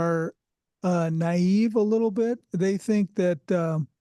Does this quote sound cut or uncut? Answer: uncut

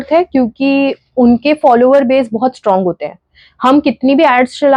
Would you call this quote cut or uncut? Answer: uncut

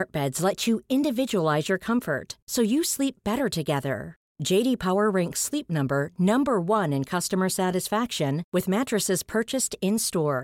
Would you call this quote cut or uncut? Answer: uncut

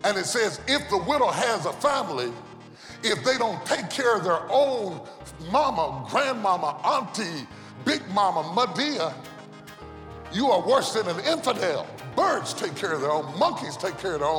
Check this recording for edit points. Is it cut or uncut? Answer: cut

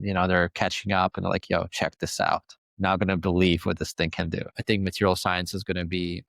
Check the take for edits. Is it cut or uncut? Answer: cut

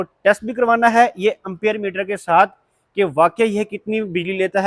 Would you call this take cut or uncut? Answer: uncut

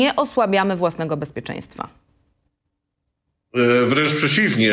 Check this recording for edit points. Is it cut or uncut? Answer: uncut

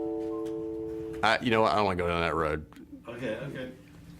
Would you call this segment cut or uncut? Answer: cut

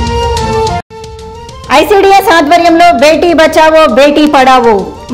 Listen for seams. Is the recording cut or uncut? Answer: cut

